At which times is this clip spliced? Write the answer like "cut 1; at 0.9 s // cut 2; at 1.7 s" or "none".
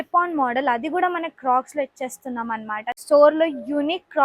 cut 1; at 2.9 s